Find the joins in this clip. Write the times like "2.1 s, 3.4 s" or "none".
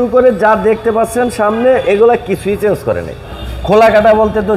3.4 s